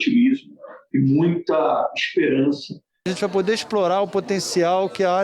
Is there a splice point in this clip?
yes; 1 cut; at 3.1 s

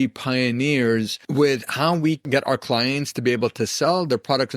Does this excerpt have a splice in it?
yes; 2 cuts; at 1.2 s, 2.2 s

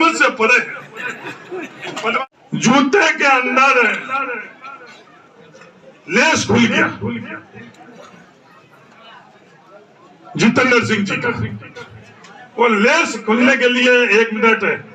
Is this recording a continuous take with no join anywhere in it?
no; 1 cut; at 2.2 s

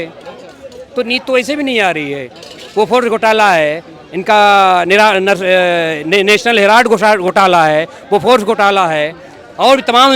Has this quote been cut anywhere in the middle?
no; 0 cuts

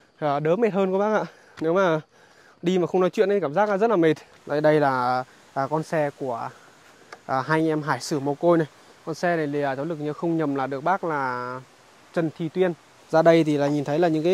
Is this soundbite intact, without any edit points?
no; 2 cuts; at 4.3 s, 12.9 s

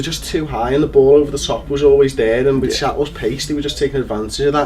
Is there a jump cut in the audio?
yes; 1 cut; at 3.1 s

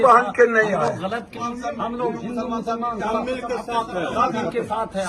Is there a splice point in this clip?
yes; 1 cut; at 1.4 s

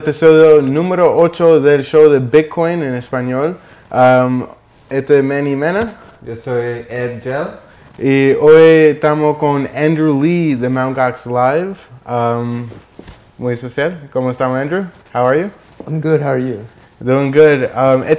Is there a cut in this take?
no; 0 cuts

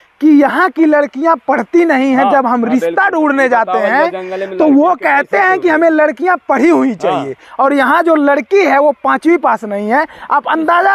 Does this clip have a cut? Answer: no; 0 cuts

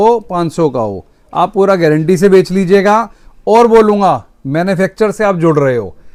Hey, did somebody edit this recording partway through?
no; 0 cuts

